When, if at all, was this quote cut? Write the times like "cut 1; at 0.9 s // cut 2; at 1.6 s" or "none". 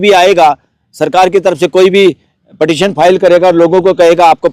none